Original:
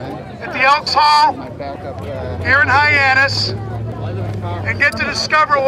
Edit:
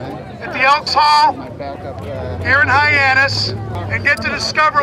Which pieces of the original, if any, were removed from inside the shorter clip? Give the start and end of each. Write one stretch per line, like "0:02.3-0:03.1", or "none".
0:03.8-0:04.5